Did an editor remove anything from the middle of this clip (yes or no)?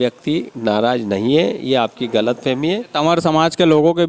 yes